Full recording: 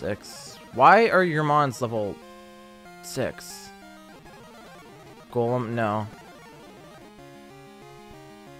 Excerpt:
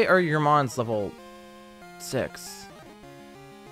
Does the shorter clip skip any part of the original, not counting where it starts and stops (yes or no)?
yes